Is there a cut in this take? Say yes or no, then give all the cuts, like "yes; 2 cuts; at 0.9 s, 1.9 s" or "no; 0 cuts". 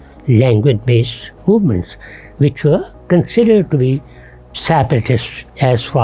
no; 0 cuts